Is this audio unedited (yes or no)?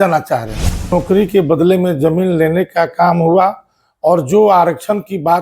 no